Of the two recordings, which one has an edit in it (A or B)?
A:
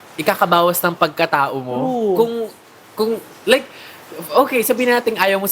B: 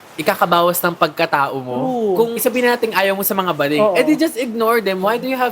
B